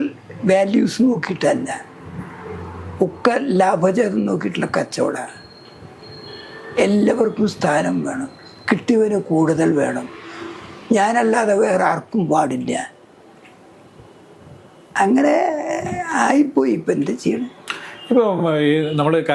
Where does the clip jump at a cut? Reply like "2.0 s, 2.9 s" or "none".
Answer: none